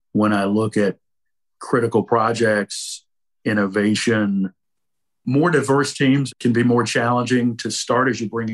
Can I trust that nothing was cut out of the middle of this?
yes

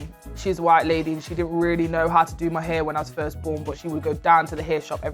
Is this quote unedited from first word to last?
no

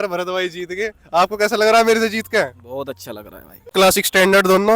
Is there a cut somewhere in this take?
yes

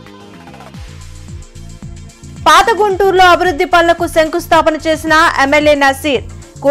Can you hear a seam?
yes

